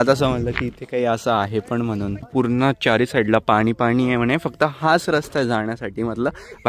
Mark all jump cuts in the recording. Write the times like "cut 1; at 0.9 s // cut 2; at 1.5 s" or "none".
cut 1; at 2.3 s